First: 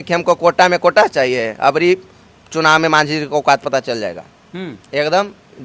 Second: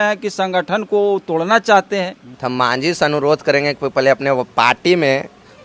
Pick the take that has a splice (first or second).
second